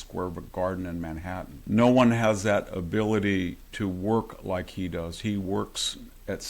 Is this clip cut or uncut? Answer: cut